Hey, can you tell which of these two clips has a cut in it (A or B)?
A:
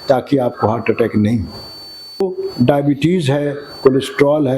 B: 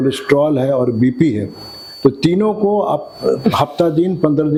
A